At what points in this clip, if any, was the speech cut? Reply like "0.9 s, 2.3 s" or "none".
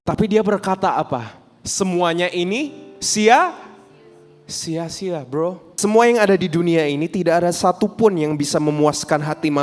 5.7 s